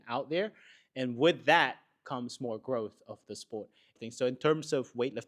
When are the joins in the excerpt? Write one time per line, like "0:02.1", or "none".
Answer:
0:04.0

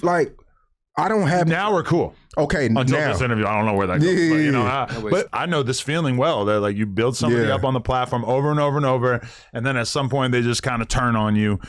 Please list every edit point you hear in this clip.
0:05.3

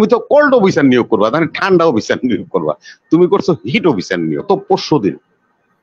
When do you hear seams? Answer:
0:04.5

